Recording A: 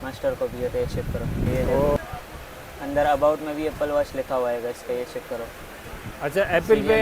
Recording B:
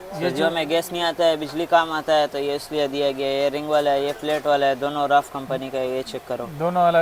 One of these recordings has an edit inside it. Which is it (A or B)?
A